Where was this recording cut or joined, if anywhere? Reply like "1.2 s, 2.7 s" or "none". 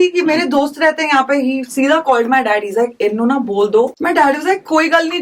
4.0 s